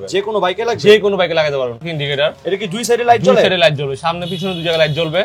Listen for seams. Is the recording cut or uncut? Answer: cut